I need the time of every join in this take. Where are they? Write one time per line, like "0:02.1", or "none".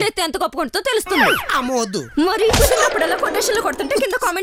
none

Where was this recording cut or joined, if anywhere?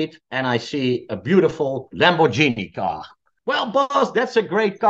0:03.3

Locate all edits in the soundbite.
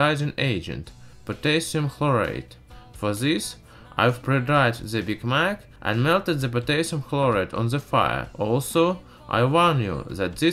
0:04.9

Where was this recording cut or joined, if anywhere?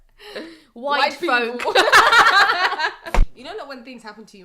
0:03.4

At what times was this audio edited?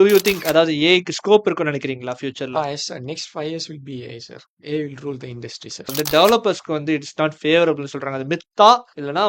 0:05.8

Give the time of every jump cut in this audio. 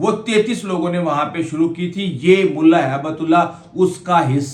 none

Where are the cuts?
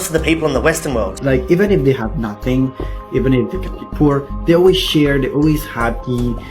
0:01.1

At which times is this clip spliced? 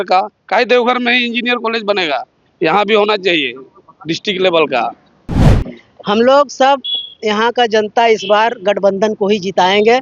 0:05.4

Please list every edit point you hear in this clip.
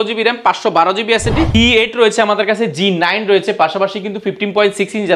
0:01.5

